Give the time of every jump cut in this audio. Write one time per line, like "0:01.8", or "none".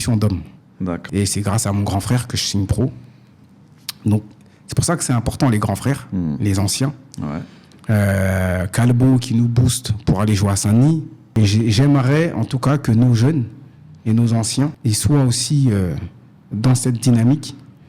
0:01.0
0:11.3
0:14.8

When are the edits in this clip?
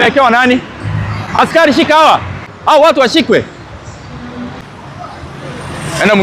0:02.5
0:04.6

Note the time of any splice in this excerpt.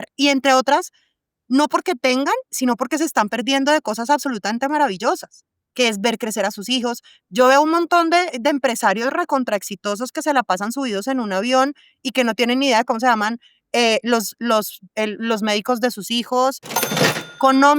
0:16.8

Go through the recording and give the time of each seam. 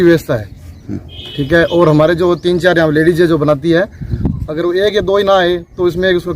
none

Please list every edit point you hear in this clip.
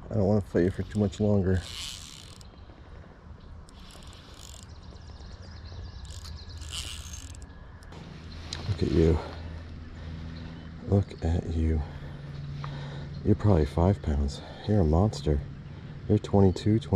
0:07.9

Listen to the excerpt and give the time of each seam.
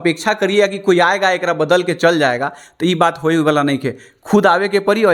none

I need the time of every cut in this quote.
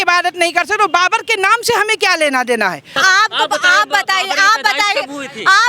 0:02.9

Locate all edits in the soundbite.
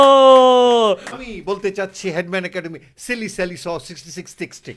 0:01.1

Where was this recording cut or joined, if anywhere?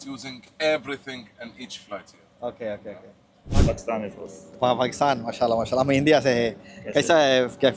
0:03.6

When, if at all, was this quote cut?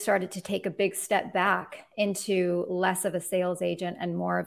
none

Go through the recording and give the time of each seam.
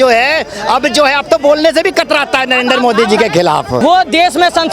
0:03.8

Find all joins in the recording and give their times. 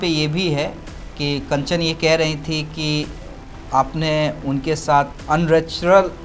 none

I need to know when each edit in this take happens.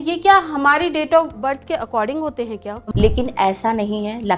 0:02.7

